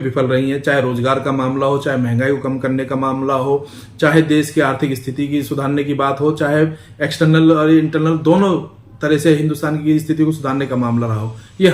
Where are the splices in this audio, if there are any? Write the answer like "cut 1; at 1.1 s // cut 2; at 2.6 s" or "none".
none

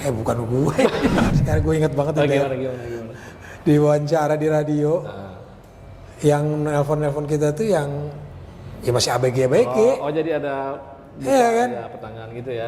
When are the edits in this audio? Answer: cut 1; at 1.3 s

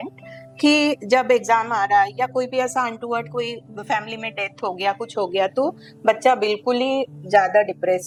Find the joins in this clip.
none

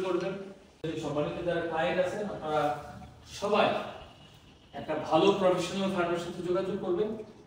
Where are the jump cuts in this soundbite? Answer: cut 1; at 0.9 s

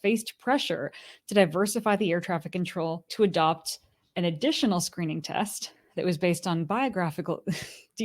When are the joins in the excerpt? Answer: cut 1; at 3.1 s

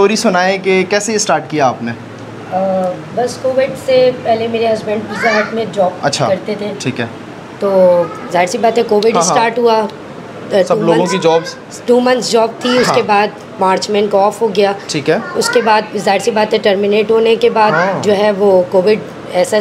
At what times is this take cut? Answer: none

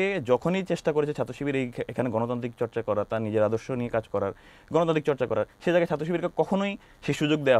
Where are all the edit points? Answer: none

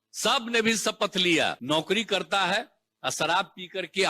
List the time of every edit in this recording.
cut 1; at 1.6 s

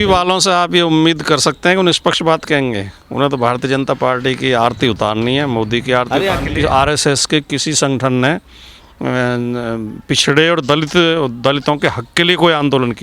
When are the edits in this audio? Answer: cut 1; at 6.4 s

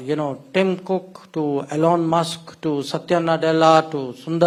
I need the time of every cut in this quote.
none

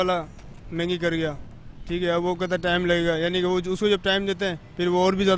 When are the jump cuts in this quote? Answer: none

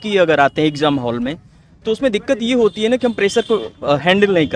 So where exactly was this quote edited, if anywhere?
none

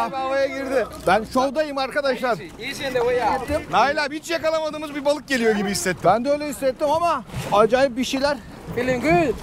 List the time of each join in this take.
cut 1; at 0.9 s // cut 2; at 3.4 s // cut 3; at 7.3 s

